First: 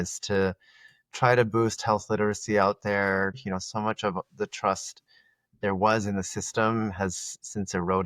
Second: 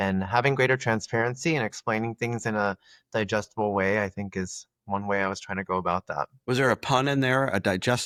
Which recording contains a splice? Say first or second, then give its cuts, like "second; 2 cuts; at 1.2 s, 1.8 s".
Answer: first; 1 cut; at 3.4 s